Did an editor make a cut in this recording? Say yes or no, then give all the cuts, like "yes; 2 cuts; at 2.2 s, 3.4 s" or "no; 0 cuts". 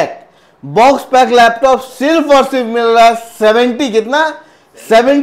no; 0 cuts